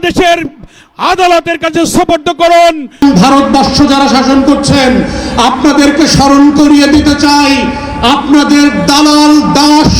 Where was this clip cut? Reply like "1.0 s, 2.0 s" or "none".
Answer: 3.0 s